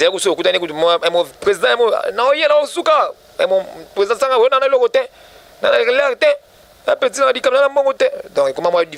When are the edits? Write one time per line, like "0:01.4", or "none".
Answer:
none